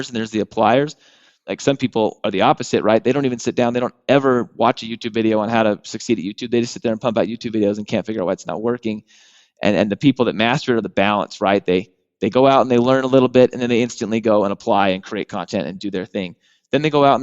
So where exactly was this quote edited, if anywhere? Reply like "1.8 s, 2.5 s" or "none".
1.5 s

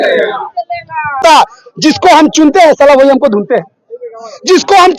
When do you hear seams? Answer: 1.2 s

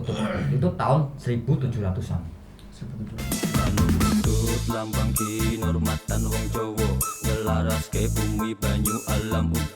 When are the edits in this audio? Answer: 3.2 s

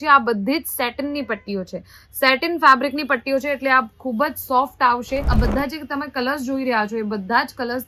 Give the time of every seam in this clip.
5.3 s

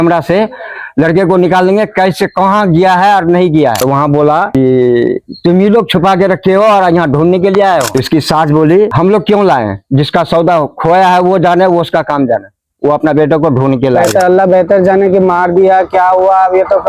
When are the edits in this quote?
3.8 s, 7.9 s, 14.1 s

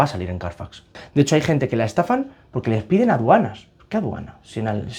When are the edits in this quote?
1.0 s

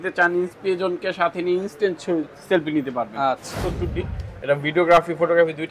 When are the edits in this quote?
3.5 s

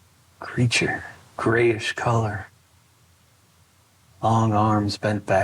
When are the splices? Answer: 1.2 s

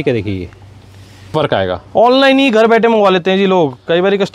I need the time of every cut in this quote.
1.3 s

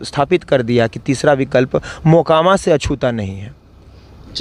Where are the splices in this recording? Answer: none

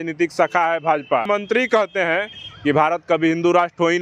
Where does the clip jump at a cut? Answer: 1.3 s

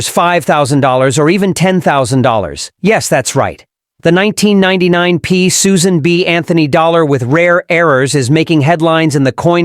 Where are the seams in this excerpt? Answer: 2.6 s

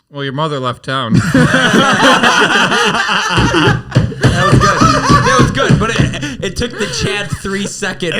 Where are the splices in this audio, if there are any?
none

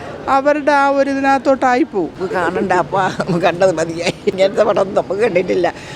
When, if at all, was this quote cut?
2.2 s, 4.3 s

